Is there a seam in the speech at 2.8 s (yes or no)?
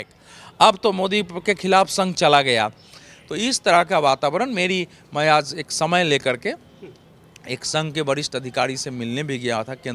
no